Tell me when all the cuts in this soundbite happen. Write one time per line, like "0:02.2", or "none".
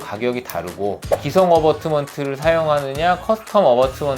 0:01.1